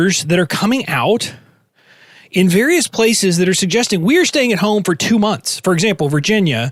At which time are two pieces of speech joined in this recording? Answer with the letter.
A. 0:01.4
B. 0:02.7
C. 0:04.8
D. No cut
D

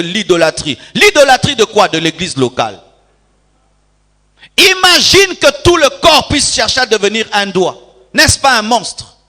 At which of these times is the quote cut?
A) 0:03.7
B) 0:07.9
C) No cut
C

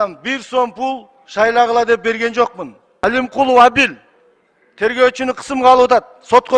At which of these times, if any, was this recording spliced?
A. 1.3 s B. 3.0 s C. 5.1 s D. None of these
B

